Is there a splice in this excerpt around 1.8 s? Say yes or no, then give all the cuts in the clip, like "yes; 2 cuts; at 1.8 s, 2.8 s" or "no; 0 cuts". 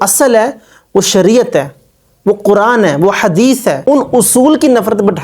no; 1 cut; at 3.8 s